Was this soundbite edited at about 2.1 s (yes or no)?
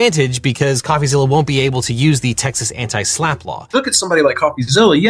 no